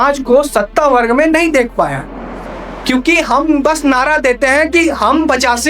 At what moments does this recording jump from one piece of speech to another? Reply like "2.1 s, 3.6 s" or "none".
2.8 s